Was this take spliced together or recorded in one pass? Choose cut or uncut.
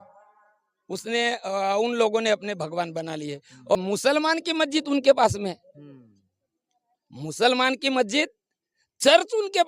cut